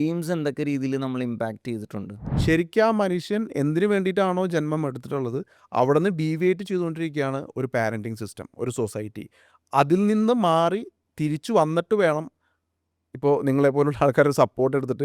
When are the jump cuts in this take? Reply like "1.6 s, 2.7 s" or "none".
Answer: 2.3 s